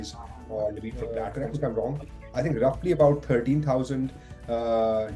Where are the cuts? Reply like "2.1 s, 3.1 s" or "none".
1.2 s